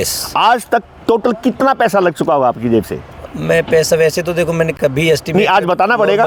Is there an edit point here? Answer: no; 0 cuts

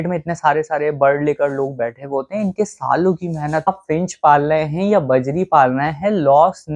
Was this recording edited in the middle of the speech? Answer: yes; 1 cut; at 3.7 s

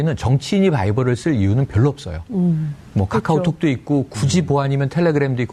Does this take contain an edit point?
no; 0 cuts

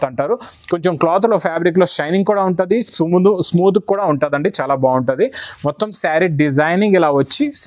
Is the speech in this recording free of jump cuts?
yes; 0 cuts

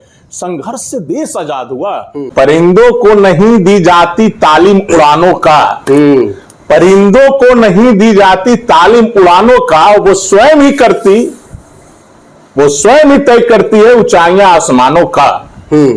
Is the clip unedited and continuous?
no; 1 cut; at 2.3 s

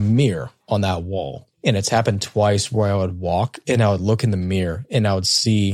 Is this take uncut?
yes; 0 cuts

